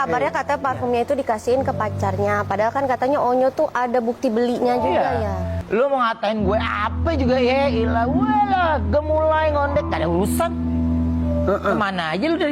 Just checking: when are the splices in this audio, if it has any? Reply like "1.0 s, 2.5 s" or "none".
5.5 s